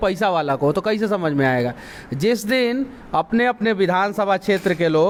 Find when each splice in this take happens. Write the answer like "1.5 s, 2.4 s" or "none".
none